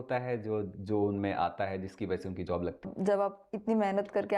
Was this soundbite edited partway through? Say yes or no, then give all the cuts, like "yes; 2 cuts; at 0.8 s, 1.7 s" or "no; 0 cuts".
yes; 1 cut; at 2.9 s